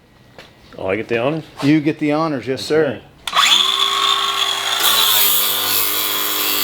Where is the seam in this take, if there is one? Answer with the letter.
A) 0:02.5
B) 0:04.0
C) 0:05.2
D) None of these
D